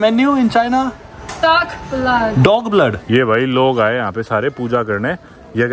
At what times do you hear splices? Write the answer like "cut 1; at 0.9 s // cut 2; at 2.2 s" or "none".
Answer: cut 1; at 3.0 s